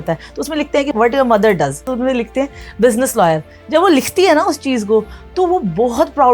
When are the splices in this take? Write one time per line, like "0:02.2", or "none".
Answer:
0:01.9
0:03.5